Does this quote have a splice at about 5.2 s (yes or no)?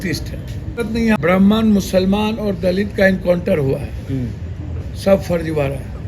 no